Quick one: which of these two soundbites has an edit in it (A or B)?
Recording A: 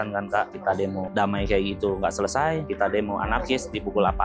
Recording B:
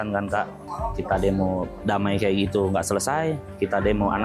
A